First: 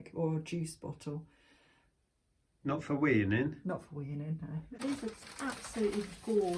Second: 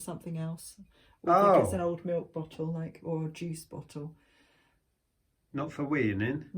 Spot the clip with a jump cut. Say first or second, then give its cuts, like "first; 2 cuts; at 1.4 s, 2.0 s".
first; 1 cut; at 4.8 s